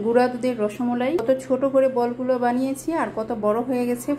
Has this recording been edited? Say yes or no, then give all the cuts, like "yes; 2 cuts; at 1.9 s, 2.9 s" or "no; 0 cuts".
yes; 1 cut; at 1.2 s